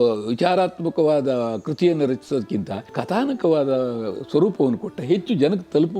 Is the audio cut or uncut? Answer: cut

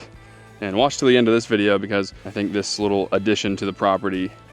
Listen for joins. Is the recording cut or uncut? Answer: cut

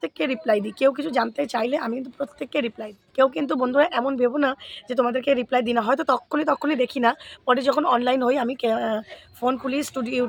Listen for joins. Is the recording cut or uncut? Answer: uncut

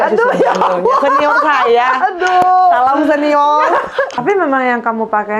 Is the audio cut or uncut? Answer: cut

